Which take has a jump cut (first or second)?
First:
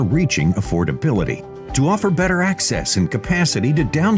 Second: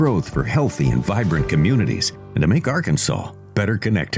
first